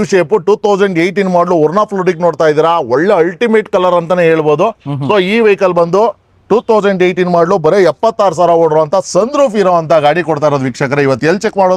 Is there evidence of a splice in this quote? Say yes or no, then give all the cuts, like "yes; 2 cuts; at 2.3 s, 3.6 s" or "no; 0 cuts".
no; 0 cuts